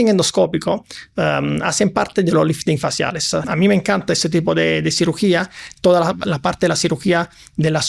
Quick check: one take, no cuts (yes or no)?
no